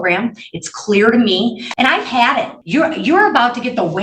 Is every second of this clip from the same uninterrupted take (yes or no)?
no